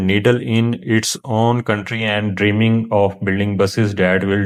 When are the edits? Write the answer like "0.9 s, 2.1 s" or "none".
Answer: none